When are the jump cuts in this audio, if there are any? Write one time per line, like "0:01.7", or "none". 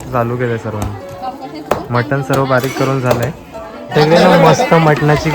0:03.8